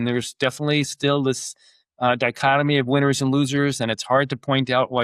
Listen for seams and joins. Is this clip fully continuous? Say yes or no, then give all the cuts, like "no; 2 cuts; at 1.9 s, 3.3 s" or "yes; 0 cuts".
yes; 0 cuts